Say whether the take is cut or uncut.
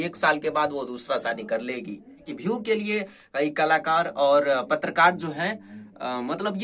cut